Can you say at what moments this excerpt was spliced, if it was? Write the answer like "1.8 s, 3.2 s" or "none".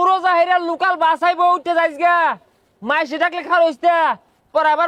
none